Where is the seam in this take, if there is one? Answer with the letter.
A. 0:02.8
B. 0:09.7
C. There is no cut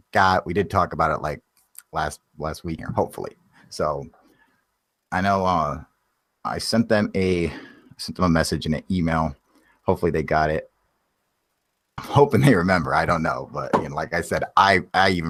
C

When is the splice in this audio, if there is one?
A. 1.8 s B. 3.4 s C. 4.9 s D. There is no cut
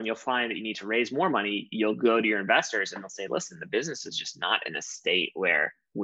D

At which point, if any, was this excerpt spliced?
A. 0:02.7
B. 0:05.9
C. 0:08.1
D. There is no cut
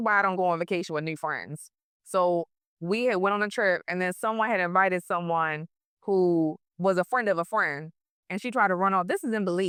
D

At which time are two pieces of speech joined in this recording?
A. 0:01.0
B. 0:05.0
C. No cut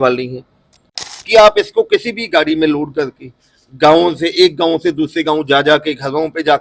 A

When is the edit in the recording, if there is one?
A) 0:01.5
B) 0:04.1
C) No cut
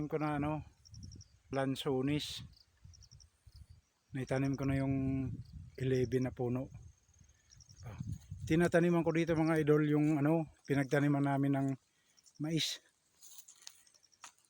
A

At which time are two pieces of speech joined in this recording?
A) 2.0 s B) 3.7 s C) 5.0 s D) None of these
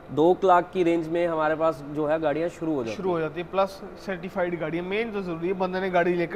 D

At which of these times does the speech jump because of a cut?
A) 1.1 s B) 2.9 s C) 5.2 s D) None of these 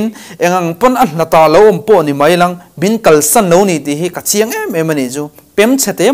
D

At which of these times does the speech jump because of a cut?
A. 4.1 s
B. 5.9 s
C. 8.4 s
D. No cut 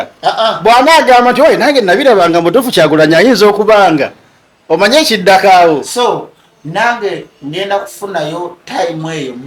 B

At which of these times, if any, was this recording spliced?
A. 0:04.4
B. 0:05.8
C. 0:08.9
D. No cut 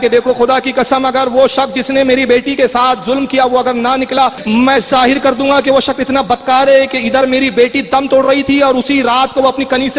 A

